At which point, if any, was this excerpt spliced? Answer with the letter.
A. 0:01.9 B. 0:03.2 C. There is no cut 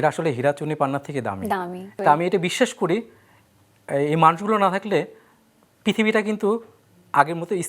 A